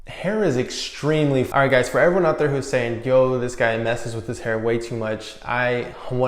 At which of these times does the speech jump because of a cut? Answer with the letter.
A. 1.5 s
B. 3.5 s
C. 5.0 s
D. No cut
A